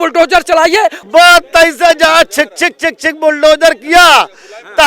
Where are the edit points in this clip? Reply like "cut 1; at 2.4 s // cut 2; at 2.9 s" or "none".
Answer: cut 1; at 1.0 s